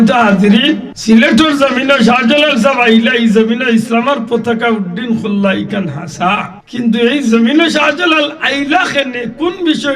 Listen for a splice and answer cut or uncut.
cut